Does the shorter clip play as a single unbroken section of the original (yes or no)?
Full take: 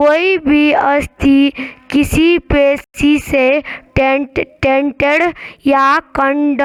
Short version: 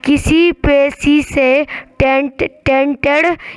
no